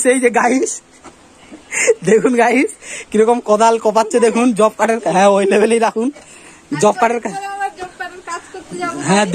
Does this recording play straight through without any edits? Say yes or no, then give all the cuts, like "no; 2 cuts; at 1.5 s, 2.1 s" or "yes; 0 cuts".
yes; 0 cuts